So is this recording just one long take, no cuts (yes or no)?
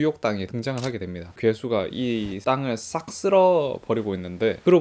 yes